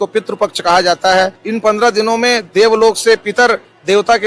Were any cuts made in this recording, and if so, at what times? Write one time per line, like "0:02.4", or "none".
0:01.4

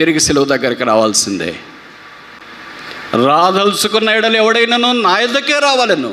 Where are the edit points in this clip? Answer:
none

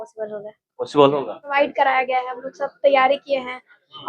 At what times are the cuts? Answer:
0:01.5

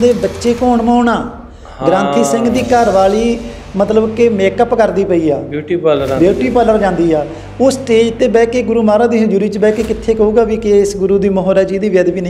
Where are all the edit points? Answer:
none

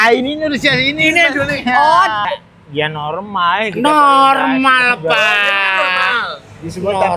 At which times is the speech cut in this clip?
0:02.2

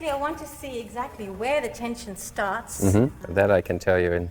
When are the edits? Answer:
0:03.2

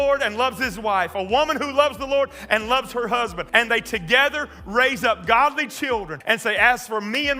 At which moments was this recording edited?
0:03.4
0:06.1

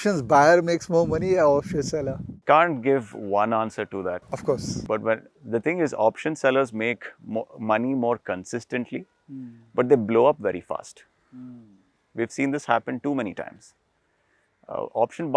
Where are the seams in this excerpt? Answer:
0:02.3

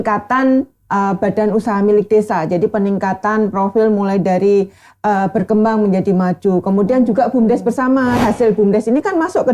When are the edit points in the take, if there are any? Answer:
0:08.2

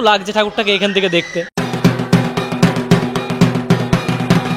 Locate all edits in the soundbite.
none

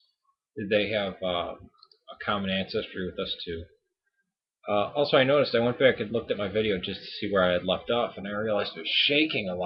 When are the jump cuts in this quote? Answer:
none

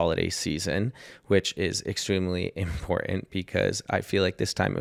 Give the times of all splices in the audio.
none

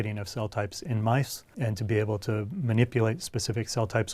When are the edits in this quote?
0:01.5

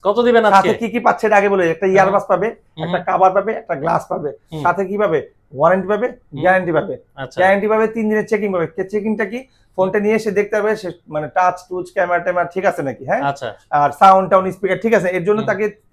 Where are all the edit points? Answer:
none

